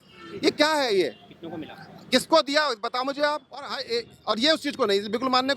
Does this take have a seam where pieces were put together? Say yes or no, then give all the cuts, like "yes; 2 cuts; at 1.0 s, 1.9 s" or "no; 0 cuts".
yes; 1 cut; at 3.8 s